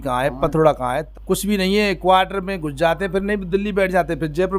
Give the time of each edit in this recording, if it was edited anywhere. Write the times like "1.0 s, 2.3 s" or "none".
1.0 s